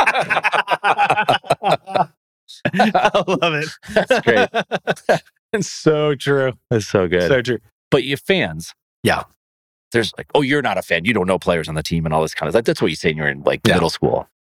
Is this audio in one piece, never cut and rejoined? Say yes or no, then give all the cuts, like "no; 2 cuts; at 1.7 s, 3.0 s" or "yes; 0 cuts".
no; 1 cut; at 7.7 s